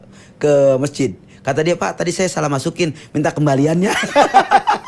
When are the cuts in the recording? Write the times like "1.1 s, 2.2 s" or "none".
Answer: none